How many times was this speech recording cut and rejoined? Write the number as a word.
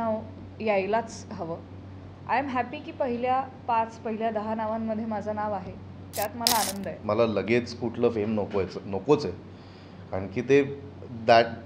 one